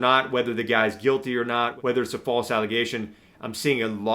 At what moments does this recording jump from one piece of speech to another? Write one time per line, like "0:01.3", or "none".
0:01.7